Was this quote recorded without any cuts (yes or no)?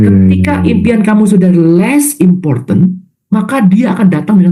yes